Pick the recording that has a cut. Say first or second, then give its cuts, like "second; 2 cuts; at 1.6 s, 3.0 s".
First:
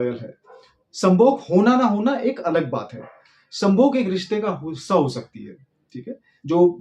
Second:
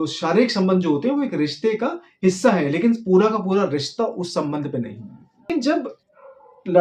second; 1 cut; at 5.5 s